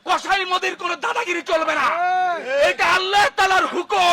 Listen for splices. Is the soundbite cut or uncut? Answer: uncut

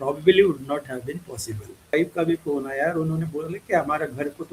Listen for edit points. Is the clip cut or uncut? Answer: cut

